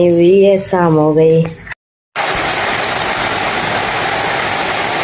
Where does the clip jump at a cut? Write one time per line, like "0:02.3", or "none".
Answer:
none